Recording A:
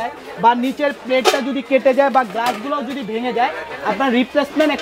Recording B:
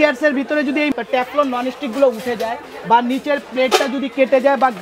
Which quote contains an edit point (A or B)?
B